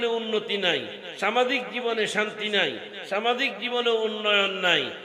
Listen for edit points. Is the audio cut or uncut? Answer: uncut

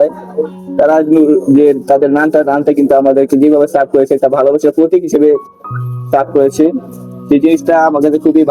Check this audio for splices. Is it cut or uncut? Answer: uncut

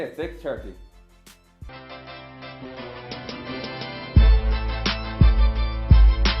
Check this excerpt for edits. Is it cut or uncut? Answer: cut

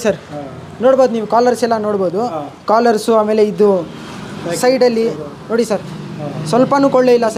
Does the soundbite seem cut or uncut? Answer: uncut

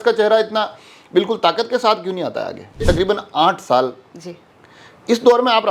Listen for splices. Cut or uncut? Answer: cut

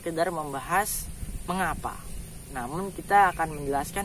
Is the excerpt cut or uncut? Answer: uncut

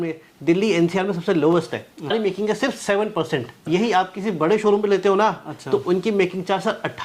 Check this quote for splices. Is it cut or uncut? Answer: cut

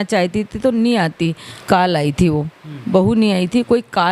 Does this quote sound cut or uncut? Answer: cut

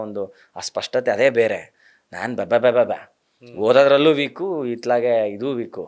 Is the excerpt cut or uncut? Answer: uncut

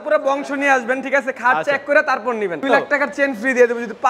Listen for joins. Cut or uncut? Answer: cut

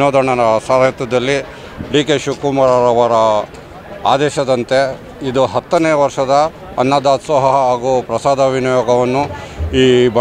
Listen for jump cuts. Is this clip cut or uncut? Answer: uncut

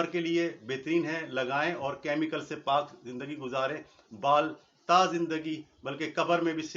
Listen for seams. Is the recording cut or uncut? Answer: uncut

